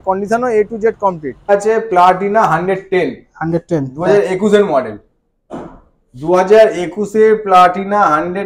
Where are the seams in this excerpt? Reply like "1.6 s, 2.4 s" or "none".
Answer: 1.5 s